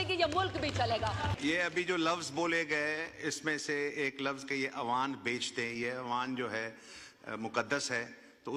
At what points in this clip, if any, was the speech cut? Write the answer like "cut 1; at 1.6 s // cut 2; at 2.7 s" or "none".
cut 1; at 1.3 s